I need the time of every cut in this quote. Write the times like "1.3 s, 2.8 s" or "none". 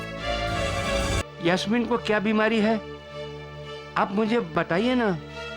1.2 s